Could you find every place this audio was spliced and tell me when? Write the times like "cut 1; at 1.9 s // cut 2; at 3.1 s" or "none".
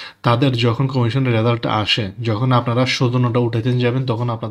none